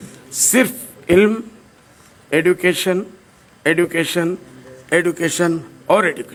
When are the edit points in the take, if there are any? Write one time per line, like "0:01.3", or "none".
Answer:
none